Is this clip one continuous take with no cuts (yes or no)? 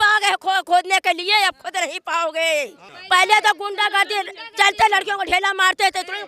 no